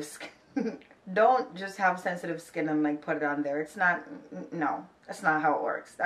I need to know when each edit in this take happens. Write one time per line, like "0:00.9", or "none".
0:00.9

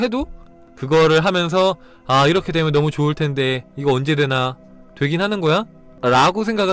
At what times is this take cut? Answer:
0:05.8

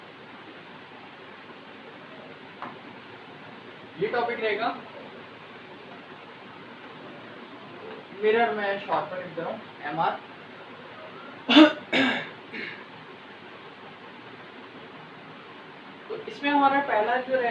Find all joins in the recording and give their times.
none

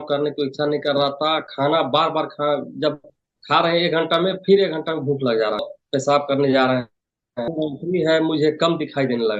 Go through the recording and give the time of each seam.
0:05.7
0:07.5

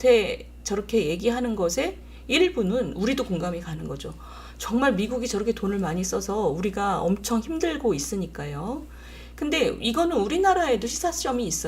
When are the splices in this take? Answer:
none

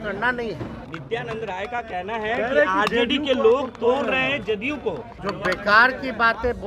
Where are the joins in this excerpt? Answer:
0:01.0
0:05.1

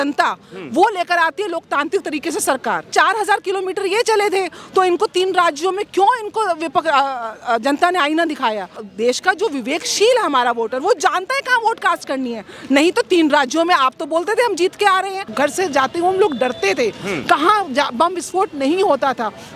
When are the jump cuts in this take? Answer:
0:02.9
0:08.8
0:15.3

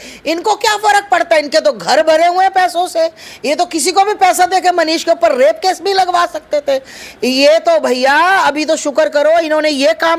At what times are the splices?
none

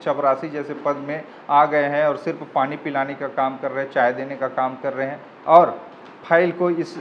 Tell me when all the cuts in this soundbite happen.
none

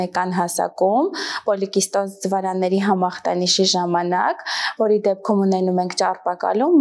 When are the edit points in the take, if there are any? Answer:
none

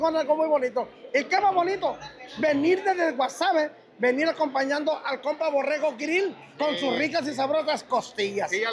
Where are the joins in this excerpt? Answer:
none

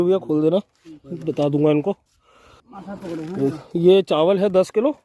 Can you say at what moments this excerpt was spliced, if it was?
none

